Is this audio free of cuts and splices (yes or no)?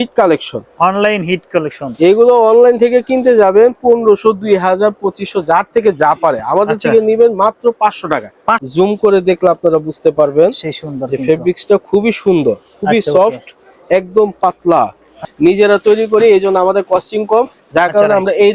no